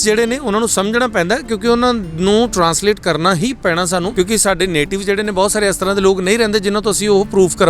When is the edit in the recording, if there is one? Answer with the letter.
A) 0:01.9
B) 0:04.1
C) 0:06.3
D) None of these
B